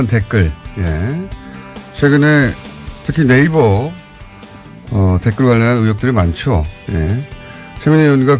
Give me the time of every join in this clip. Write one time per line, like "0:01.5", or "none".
none